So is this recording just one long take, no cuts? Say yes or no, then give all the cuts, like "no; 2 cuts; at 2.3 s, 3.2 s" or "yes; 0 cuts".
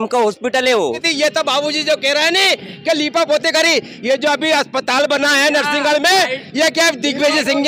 no; 1 cut; at 1.1 s